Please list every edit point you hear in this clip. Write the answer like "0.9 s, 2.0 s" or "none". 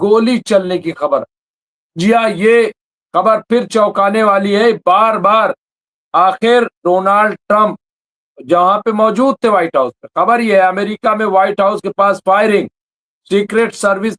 none